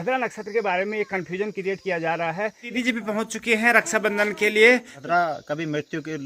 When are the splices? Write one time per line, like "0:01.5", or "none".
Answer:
0:02.7
0:04.9